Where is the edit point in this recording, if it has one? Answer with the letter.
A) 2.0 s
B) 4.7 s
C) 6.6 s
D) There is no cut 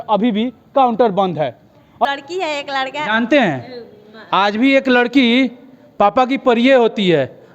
A